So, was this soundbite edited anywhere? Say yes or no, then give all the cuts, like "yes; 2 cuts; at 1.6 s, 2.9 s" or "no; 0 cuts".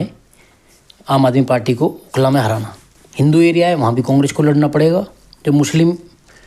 yes; 1 cut; at 3.2 s